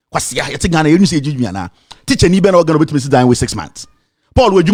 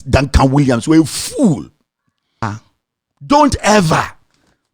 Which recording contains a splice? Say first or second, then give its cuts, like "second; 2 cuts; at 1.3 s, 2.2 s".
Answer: second; 1 cut; at 2.5 s